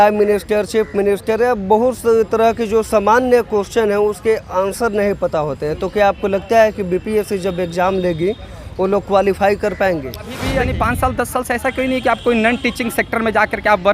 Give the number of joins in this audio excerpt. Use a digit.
1